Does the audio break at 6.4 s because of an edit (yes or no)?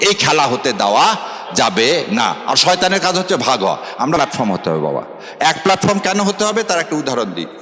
no